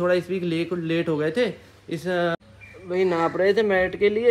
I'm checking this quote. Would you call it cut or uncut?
cut